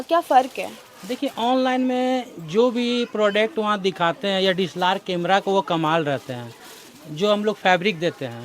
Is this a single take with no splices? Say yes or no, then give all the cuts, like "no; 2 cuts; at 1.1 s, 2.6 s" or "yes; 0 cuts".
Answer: yes; 0 cuts